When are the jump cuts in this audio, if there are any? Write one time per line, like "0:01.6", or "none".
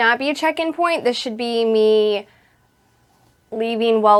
none